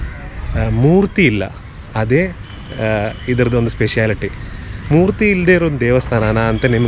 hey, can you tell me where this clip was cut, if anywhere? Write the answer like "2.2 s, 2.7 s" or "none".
none